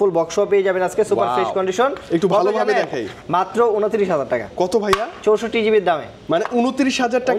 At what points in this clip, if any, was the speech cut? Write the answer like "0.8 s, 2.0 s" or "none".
none

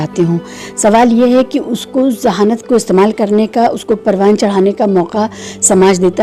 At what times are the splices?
none

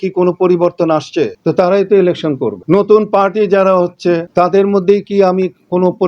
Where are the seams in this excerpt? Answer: 1.4 s, 2.6 s, 4.3 s

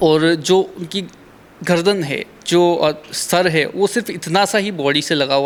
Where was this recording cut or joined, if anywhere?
none

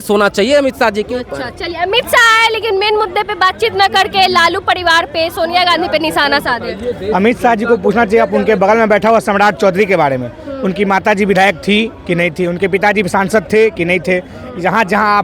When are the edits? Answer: none

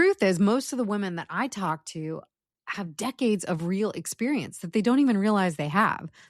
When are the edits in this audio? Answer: none

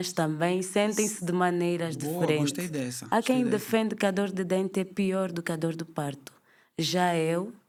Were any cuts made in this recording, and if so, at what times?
none

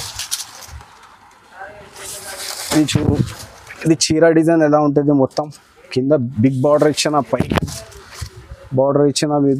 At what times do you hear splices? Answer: none

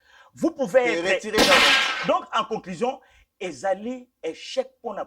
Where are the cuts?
1.7 s

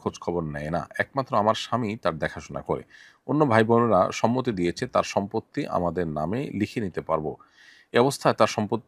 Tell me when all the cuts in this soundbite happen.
none

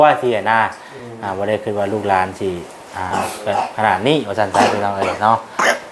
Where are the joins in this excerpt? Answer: 3.1 s

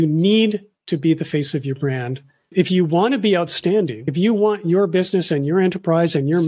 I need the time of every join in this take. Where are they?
2.5 s, 4.0 s

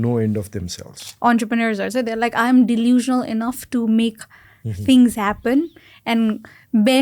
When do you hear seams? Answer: 1.0 s

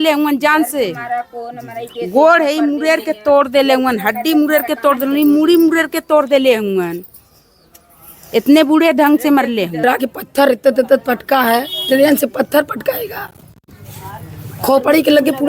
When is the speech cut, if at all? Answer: 9.8 s

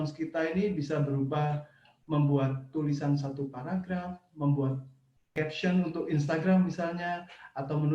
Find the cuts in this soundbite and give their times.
5.3 s

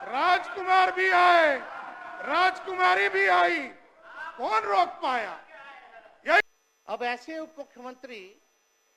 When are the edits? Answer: 6.4 s

